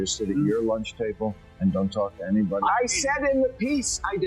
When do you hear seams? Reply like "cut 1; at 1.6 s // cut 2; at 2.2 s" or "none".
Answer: cut 1; at 2.6 s

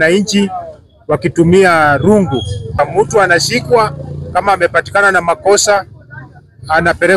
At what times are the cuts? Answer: cut 1; at 2.7 s

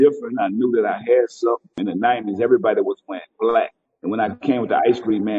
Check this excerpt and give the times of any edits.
cut 1; at 1.8 s // cut 2; at 3.9 s

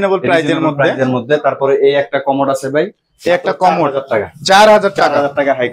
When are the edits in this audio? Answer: none

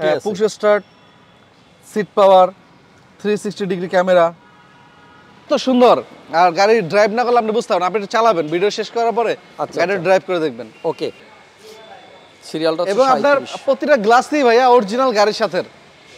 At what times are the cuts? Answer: cut 1; at 5.5 s // cut 2; at 11.3 s

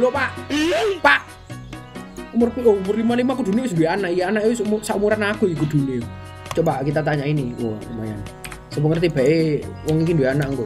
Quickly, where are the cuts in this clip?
none

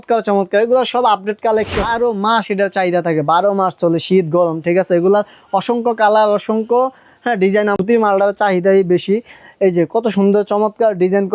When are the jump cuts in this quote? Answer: cut 1; at 1.9 s // cut 2; at 7.8 s

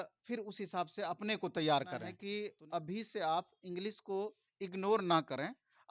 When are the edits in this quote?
cut 1; at 2.1 s

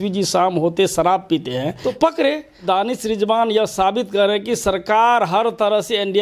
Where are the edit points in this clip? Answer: cut 1; at 1.8 s // cut 2; at 2.6 s

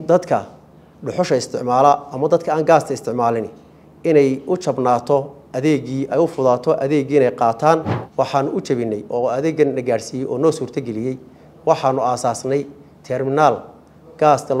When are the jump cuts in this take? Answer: cut 1; at 8.0 s

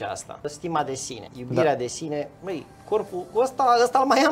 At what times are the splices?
cut 1; at 0.9 s

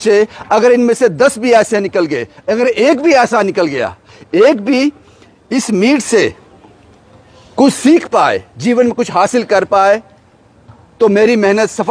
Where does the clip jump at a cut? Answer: none

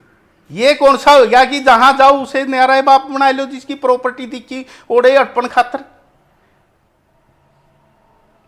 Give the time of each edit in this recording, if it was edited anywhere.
none

